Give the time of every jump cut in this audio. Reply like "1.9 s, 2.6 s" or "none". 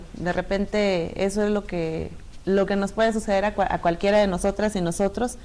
3.5 s